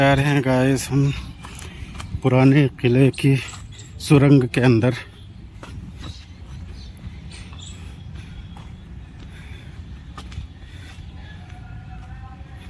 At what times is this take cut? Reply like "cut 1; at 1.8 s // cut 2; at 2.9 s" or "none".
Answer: none